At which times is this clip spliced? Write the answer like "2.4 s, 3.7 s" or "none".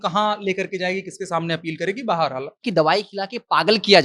2.7 s